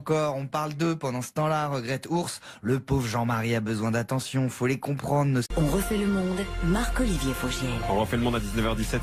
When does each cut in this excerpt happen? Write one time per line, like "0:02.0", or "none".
none